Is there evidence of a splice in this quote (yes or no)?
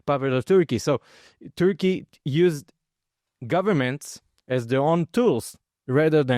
no